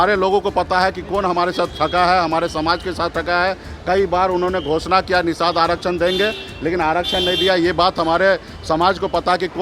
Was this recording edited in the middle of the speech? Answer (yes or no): no